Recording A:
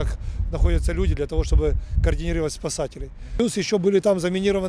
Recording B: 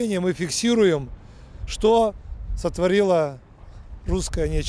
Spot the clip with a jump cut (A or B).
A